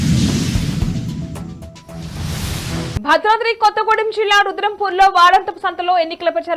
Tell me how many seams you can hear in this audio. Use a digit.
1